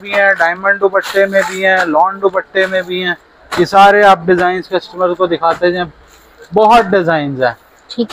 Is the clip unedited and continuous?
yes; 0 cuts

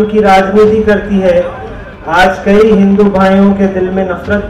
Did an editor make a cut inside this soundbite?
no; 0 cuts

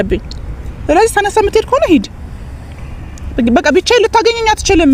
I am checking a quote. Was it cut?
no; 0 cuts

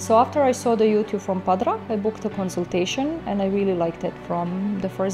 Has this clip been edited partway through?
no; 0 cuts

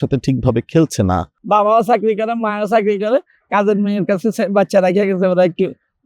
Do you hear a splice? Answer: yes; 1 cut; at 1.3 s

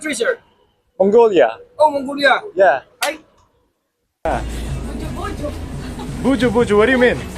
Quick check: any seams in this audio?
yes; 1 cut; at 4.2 s

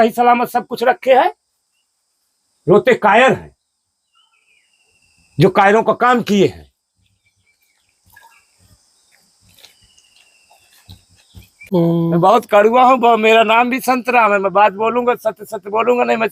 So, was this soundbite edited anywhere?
no; 0 cuts

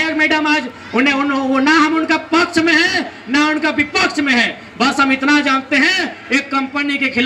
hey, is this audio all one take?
yes; 0 cuts

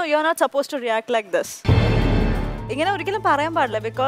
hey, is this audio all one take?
yes; 0 cuts

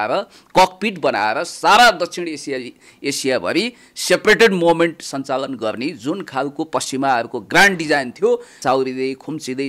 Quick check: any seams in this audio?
yes; 1 cut; at 8.6 s

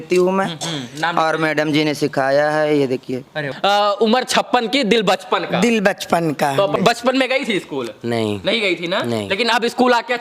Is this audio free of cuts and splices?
no; 2 cuts; at 3.5 s, 6.8 s

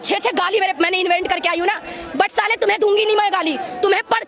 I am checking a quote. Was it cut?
no; 0 cuts

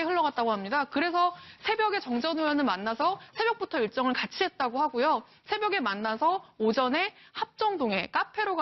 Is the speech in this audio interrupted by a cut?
yes; 1 cut; at 6.0 s

